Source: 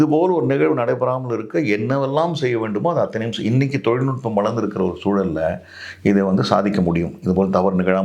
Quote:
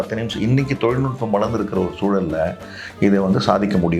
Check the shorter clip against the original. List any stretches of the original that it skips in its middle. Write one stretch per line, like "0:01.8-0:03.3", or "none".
none